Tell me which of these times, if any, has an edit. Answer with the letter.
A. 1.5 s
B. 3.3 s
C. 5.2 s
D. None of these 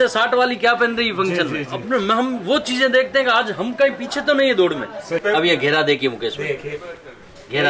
C